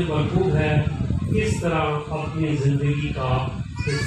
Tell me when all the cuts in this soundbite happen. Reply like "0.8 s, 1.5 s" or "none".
none